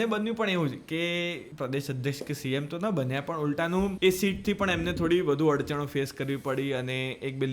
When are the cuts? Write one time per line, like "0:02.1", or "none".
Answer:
0:01.5
0:03.9